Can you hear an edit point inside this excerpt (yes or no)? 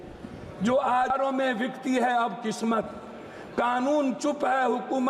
yes